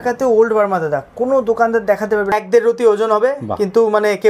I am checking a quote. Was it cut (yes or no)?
yes